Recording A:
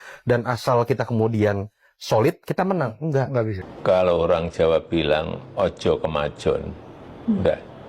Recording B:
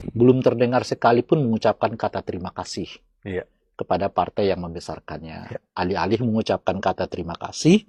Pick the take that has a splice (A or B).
A